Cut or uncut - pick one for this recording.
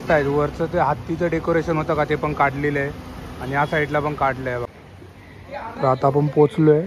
cut